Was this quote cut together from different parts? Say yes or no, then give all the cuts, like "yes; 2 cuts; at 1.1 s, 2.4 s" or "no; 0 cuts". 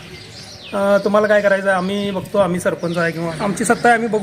yes; 1 cut; at 3.3 s